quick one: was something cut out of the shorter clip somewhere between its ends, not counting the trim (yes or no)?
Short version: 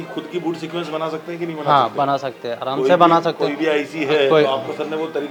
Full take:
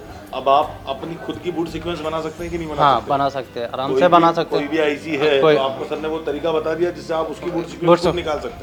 no